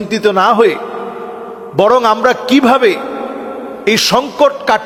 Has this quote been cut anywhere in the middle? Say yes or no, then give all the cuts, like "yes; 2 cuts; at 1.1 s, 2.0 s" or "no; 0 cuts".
no; 0 cuts